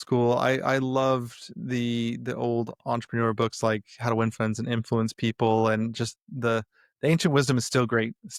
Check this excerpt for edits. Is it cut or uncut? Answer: uncut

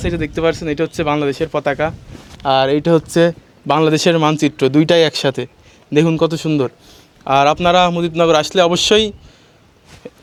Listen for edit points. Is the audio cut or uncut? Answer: uncut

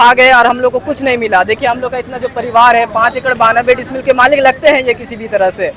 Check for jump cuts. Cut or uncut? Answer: uncut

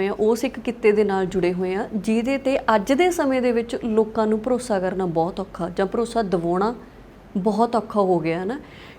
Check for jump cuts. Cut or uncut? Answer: uncut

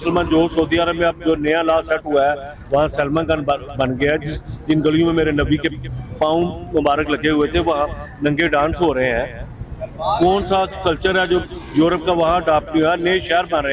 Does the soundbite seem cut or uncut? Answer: uncut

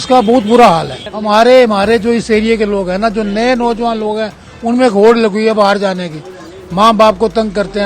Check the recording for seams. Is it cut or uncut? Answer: cut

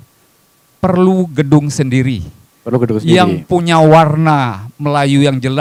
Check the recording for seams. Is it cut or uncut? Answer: uncut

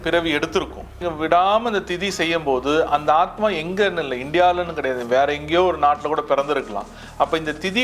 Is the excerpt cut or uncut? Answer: cut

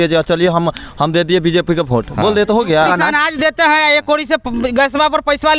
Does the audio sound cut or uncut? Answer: cut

